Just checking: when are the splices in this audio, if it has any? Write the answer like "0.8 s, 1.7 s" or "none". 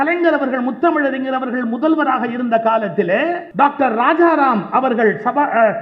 3.5 s

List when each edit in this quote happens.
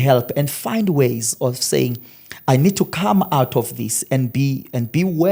none

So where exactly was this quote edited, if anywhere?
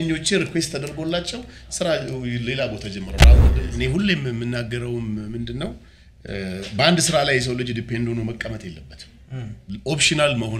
3.6 s

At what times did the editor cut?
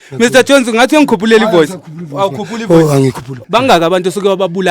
3.3 s

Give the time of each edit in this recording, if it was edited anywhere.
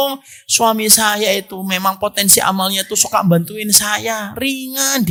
none

